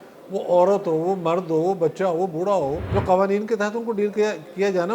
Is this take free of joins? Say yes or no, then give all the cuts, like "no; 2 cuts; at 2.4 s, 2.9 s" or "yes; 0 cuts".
no; 1 cut; at 2.8 s